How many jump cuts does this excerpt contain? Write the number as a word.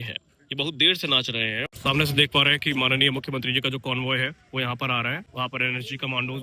two